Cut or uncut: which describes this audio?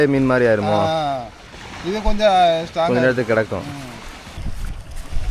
cut